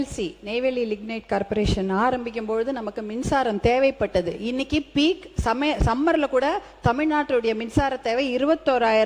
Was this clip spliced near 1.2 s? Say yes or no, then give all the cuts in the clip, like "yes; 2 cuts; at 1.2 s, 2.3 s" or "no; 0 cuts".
no; 0 cuts